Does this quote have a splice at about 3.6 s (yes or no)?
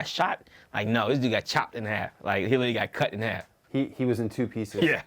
yes